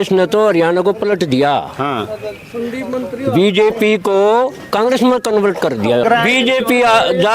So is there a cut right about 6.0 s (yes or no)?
yes